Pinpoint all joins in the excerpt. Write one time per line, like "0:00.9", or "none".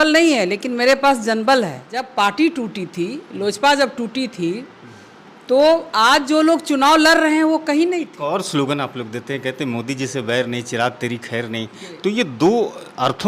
0:02.1
0:08.1